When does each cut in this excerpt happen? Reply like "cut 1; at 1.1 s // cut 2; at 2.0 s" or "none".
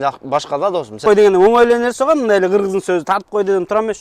cut 1; at 1.0 s